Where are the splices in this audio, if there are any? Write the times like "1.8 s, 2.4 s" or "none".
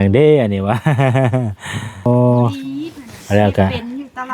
2.1 s